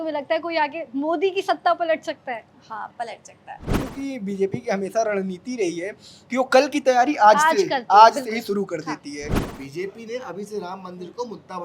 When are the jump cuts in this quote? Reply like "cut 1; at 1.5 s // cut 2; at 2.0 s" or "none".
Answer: cut 1; at 3.9 s // cut 2; at 9.4 s